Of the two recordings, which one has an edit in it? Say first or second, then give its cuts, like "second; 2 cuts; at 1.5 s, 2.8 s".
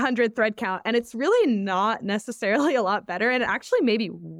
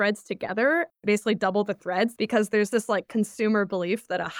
second; 2 cuts; at 0.9 s, 2.1 s